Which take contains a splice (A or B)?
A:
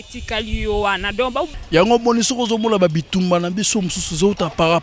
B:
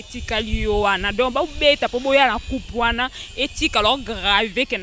A